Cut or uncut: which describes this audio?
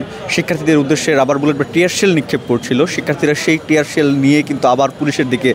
uncut